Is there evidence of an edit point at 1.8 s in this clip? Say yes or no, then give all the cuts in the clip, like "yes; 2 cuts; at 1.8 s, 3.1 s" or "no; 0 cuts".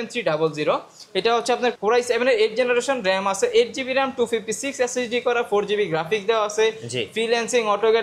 yes; 1 cut; at 1.8 s